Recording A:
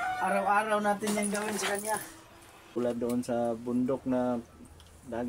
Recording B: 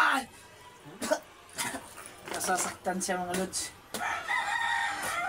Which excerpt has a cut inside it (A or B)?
A